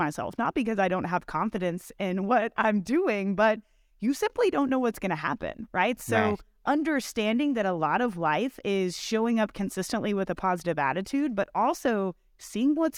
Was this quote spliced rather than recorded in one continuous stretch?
no; 0 cuts

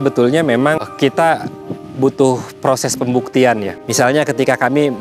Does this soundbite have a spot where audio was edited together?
yes; 2 cuts; at 0.8 s, 3.8 s

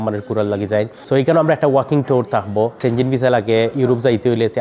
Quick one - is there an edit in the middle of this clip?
yes; 2 cuts; at 1.0 s, 2.8 s

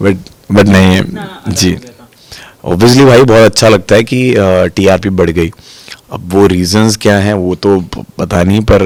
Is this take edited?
no; 0 cuts

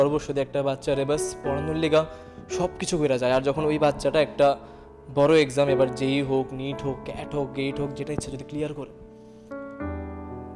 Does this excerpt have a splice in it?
yes; 1 cut; at 9.3 s

